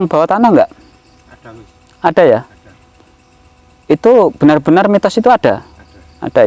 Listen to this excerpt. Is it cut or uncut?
uncut